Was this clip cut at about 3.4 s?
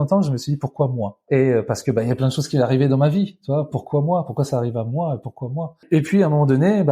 no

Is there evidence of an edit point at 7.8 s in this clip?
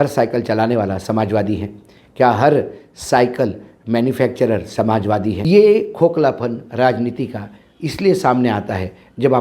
no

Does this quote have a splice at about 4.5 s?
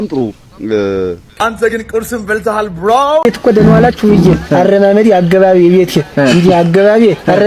no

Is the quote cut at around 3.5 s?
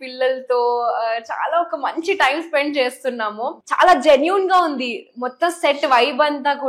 yes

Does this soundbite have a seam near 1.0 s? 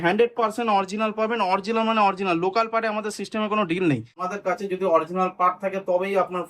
no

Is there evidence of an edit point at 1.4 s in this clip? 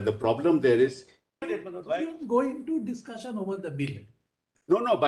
yes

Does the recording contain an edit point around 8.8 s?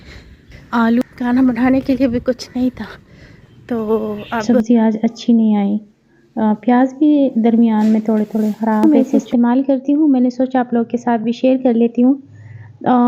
yes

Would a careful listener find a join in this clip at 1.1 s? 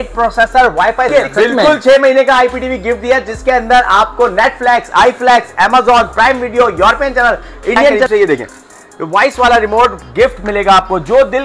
yes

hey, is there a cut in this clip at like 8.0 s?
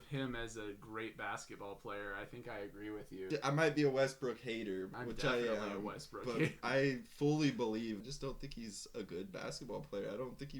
yes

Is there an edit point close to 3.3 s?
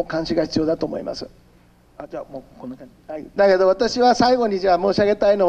yes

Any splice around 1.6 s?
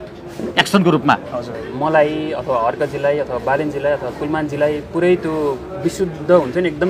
yes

